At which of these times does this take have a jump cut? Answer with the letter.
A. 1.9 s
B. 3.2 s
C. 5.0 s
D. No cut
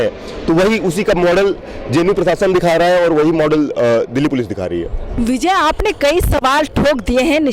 D